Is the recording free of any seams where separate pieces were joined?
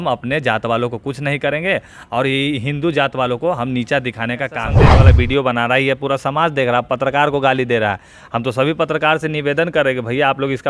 no; 1 cut; at 4.8 s

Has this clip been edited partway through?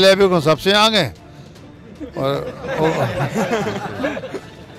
no; 0 cuts

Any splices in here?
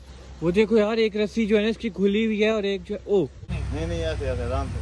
yes; 1 cut; at 3.5 s

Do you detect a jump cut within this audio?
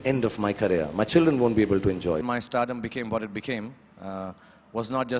yes; 1 cut; at 2.2 s

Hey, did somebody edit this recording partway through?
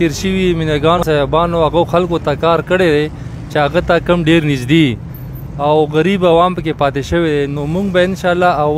yes; 1 cut; at 1.0 s

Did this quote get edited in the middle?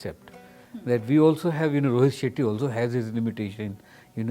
no; 0 cuts

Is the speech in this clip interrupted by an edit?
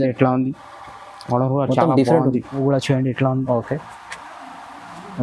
yes; 1 cut; at 2.6 s

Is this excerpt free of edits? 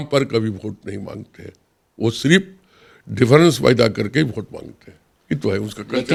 yes; 0 cuts

